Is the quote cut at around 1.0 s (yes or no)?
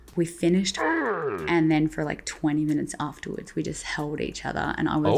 yes